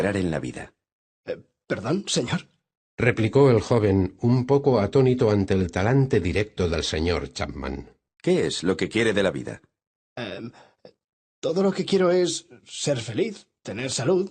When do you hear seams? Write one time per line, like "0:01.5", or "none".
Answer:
0:09.2